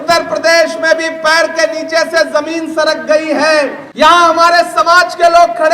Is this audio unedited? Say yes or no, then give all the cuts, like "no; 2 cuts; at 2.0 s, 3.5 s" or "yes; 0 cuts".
no; 1 cut; at 3.8 s